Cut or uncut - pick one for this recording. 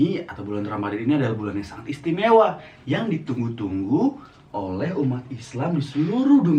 uncut